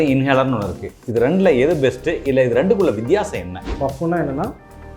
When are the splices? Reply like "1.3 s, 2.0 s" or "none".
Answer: 3.7 s